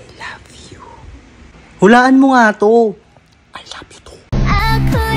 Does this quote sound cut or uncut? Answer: cut